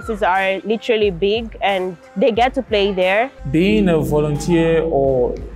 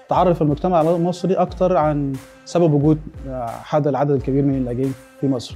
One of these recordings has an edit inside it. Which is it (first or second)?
first